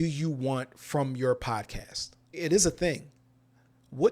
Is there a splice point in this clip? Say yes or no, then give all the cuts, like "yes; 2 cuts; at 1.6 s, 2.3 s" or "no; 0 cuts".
yes; 1 cut; at 2.4 s